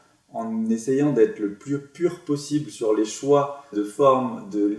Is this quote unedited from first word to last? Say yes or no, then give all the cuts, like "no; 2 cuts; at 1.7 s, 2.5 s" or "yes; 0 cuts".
no; 1 cut; at 3.8 s